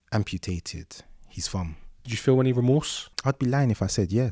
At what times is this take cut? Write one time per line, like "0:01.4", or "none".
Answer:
0:02.1
0:03.0